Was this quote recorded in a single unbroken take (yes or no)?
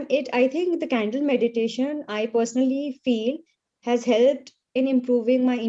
yes